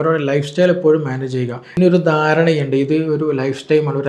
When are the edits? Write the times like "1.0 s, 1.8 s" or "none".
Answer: 1.8 s